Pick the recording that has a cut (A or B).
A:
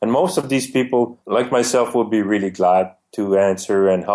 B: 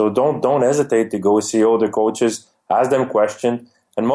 A